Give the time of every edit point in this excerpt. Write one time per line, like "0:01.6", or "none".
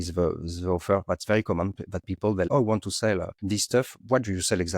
0:02.5
0:03.3

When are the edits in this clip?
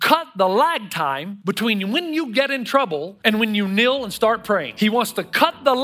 0:01.3
0:03.1
0:04.7

